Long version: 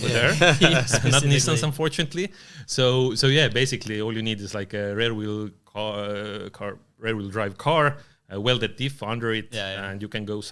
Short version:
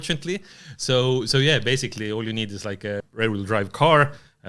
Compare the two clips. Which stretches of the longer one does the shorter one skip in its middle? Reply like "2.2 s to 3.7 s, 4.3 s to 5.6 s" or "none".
4.9 s to 6.9 s